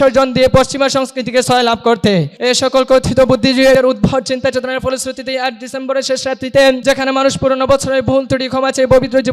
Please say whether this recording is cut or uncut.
cut